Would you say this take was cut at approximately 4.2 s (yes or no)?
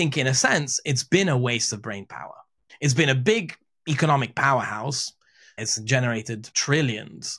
no